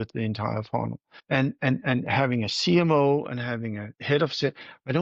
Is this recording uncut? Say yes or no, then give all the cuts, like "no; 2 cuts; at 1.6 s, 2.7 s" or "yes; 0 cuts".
no; 1 cut; at 1.1 s